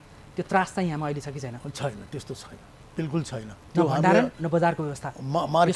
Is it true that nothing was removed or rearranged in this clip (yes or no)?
no